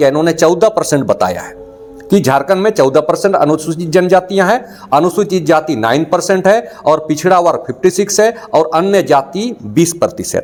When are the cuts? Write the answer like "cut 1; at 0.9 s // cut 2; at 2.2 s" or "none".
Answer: none